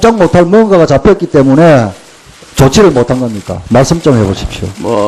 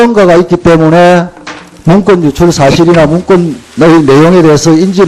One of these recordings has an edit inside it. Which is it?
first; 1 cut; at 4.0 s

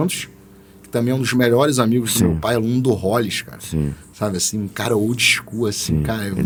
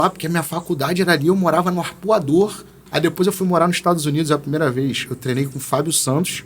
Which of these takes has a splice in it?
second; 1 cut; at 2.8 s

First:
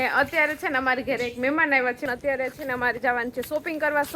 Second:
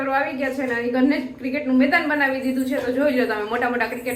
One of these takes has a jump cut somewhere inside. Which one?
first; 1 cut; at 2.1 s

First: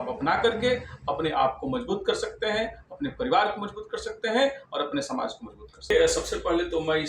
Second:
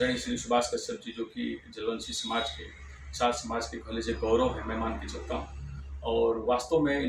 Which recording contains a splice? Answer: first; 1 cut; at 5.9 s

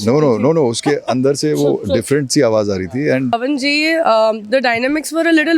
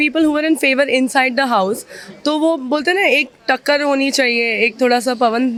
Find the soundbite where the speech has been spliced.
first; 1 cut; at 3.3 s

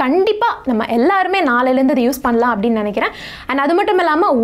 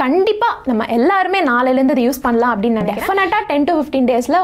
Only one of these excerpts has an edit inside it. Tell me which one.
second; 1 cut; at 2.9 s

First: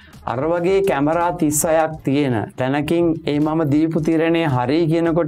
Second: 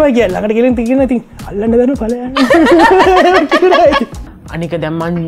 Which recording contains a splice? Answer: second; 1 cut; at 4.2 s

